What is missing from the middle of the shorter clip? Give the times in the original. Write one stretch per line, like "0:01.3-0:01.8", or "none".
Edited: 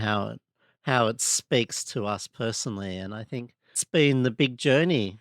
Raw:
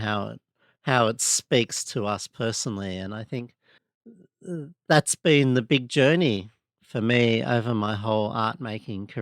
0:03.8-0:05.1